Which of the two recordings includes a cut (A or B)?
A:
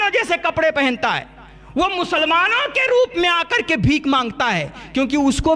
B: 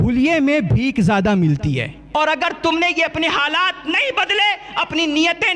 B